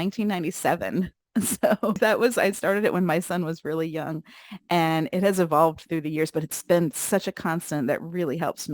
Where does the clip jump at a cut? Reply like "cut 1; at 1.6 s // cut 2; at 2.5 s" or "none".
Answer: cut 1; at 2.0 s